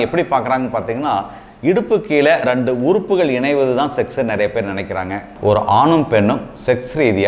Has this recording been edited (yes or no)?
yes